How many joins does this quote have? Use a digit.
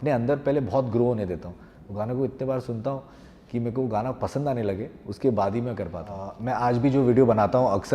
1